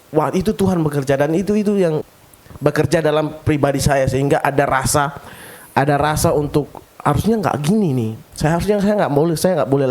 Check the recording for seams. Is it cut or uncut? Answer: cut